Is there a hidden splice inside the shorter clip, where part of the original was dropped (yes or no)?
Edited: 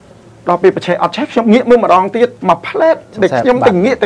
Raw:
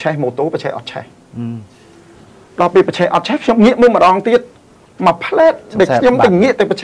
yes